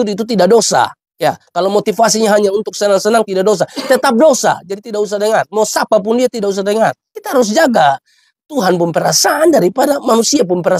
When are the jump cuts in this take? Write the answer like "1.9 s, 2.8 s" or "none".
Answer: none